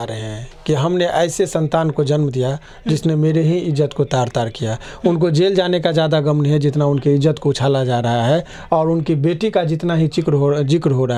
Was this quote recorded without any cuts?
yes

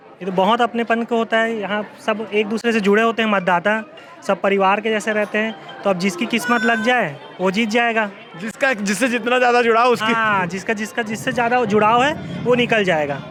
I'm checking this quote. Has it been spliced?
no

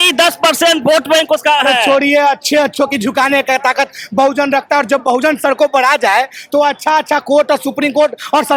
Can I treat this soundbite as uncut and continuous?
yes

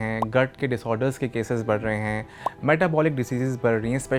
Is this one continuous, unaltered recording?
yes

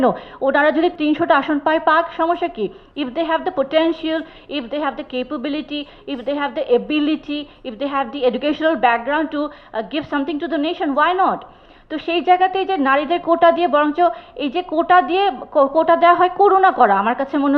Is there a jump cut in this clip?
yes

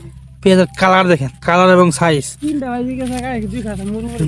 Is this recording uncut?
yes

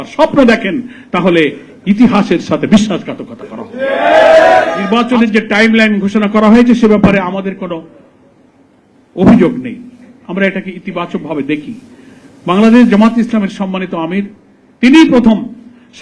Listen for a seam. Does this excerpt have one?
yes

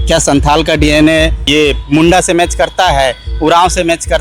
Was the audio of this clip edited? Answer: yes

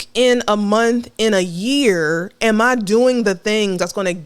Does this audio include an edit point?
no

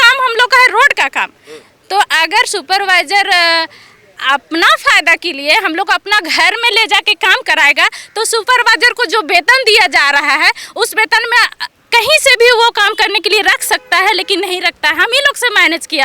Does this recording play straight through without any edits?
yes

